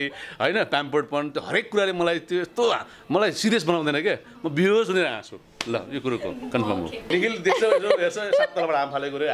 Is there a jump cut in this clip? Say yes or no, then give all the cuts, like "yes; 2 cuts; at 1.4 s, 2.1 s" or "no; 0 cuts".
yes; 1 cut; at 7.1 s